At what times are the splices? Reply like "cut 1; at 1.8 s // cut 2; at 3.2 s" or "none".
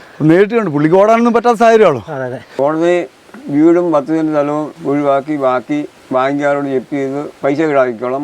cut 1; at 2.4 s // cut 2; at 4.7 s // cut 3; at 6.0 s // cut 4; at 7.3 s